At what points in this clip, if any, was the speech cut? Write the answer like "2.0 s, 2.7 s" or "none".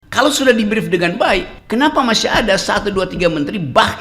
1.6 s